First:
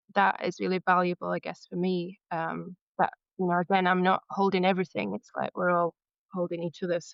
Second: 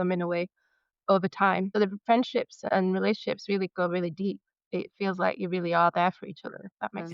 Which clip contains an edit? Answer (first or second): second